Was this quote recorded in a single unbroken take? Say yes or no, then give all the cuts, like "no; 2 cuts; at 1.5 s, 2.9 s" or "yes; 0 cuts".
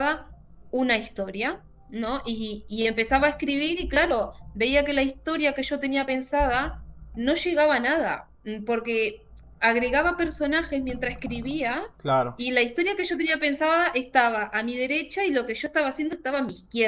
yes; 0 cuts